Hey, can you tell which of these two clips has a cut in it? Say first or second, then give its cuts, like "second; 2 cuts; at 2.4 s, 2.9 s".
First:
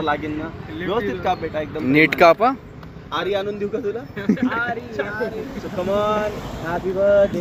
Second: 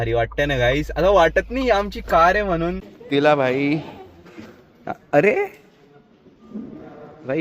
second; 1 cut; at 2.9 s